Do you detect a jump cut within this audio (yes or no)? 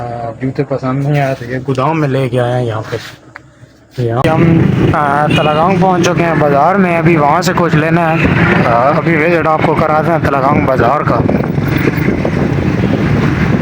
yes